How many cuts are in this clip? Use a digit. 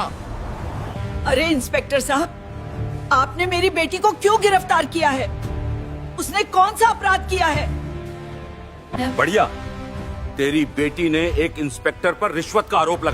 1